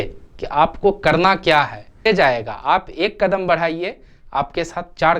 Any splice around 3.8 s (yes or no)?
no